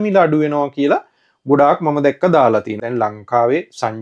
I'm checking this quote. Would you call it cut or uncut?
cut